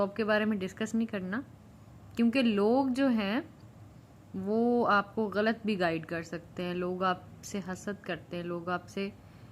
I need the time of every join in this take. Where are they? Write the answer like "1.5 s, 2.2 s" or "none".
none